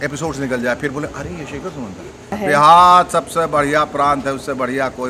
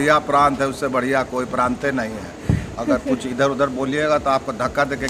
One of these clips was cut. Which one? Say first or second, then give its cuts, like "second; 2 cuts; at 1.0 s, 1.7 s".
first; 1 cut; at 2.4 s